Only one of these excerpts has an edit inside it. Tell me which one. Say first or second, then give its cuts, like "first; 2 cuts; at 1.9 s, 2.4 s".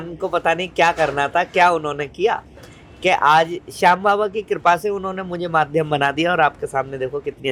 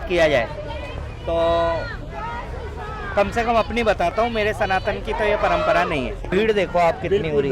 second; 1 cut; at 6.2 s